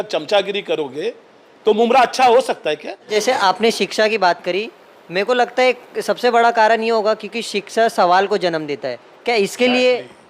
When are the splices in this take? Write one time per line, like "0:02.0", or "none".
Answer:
0:03.1